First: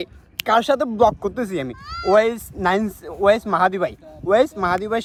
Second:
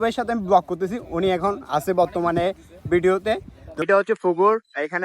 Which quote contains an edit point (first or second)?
second